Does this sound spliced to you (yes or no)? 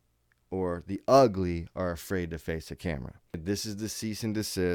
yes